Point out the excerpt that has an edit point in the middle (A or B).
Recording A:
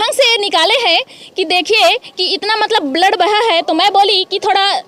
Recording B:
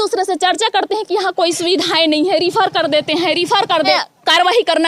B